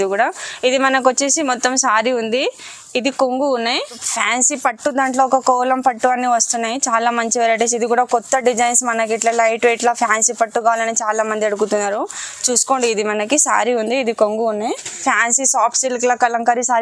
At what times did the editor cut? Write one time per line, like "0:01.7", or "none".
0:04.1
0:15.0